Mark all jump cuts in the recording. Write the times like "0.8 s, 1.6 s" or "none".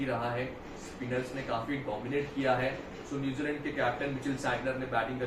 none